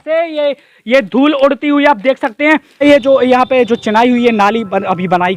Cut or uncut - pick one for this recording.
cut